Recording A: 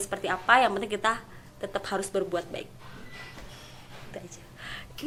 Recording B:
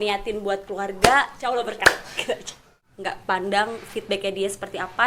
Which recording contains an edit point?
B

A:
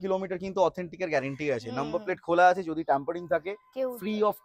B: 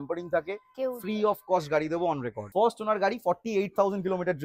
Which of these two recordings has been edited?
B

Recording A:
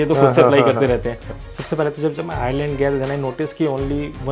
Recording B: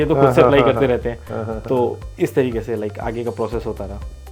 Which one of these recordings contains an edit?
A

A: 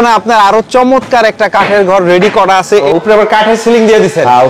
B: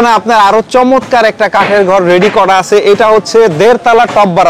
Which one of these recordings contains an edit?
A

